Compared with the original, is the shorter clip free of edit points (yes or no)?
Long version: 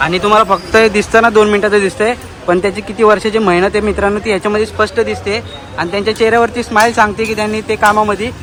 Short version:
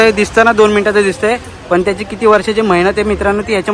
yes